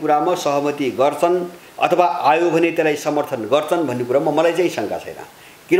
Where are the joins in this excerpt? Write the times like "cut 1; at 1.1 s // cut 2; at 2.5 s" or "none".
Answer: cut 1; at 1.6 s